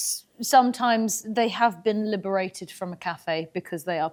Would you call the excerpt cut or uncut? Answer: uncut